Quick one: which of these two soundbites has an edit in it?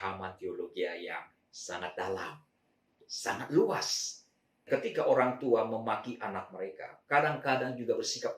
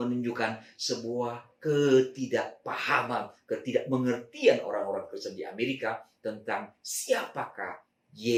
first; 1 cut; at 4.7 s

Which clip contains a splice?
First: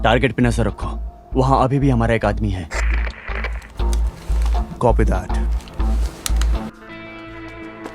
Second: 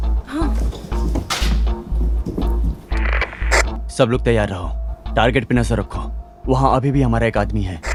first; 1 cut; at 6.7 s

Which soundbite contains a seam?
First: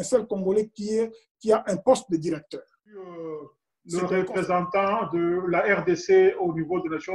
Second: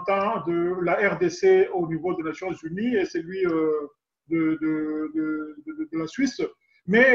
first; 1 cut; at 3.1 s

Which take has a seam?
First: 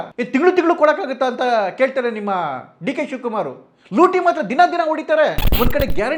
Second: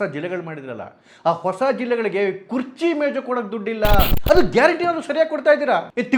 second; 1 cut; at 4.1 s

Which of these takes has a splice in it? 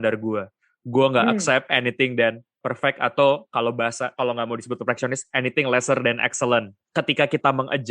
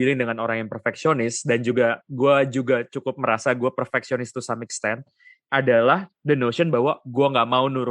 first; 1 cut; at 6.8 s

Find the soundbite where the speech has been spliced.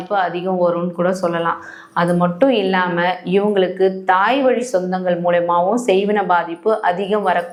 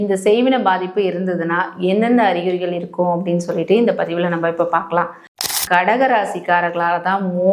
second; 1 cut; at 5.5 s

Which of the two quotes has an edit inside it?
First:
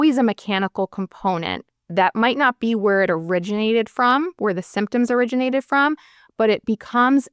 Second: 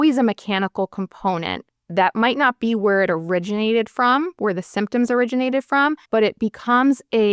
second; 1 cut; at 6.0 s

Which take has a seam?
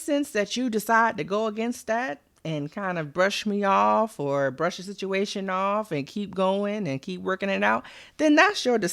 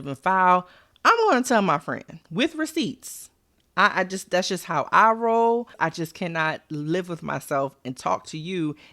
second; 2 cuts; at 2.1 s, 5.7 s

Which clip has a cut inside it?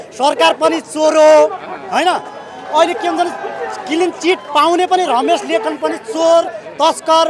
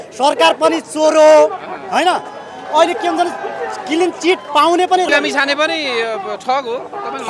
second; 1 cut; at 5.1 s

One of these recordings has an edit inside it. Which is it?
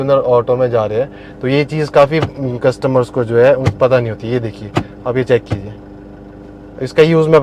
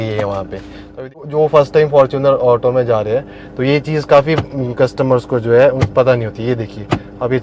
second; 1 cut; at 1.2 s

